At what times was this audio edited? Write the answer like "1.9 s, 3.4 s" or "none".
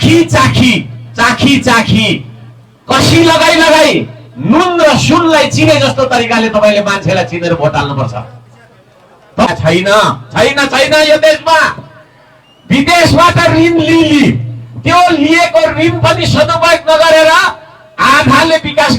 9.5 s